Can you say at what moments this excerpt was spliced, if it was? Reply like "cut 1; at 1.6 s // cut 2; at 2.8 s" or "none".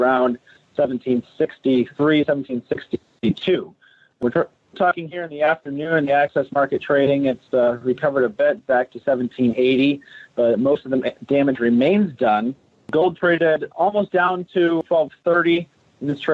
cut 1; at 10.0 s